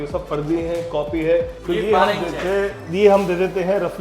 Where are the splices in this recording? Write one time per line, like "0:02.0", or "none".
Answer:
0:01.6